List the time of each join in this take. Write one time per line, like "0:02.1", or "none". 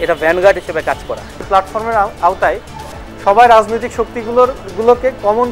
0:01.4